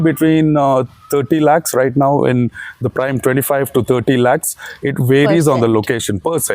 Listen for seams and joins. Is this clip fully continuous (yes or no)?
yes